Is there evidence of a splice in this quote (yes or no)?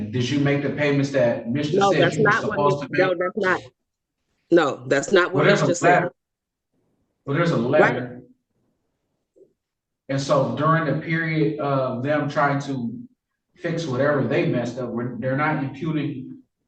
no